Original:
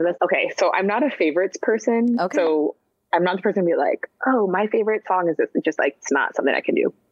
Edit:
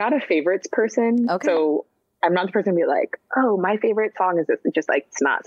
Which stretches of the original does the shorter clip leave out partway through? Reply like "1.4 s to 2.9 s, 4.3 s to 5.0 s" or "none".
none